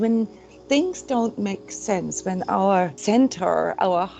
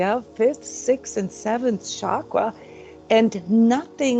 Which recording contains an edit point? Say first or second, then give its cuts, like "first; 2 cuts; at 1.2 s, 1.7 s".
first; 1 cut; at 3.0 s